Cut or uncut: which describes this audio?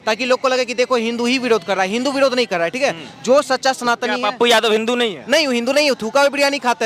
uncut